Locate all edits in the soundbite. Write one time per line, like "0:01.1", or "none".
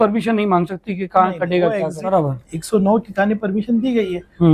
0:02.2